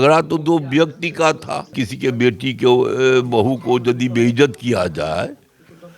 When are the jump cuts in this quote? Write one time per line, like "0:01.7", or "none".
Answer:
0:01.7